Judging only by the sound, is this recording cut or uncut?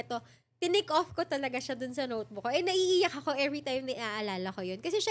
uncut